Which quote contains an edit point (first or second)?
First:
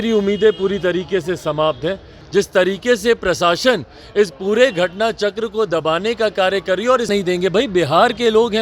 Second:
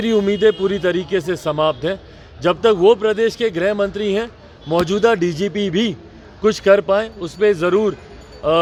first